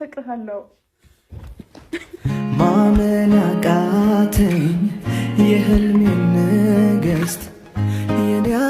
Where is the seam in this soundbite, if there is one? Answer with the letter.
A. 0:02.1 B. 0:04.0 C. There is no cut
A